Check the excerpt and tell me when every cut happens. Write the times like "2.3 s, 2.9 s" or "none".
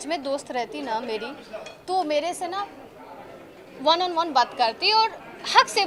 none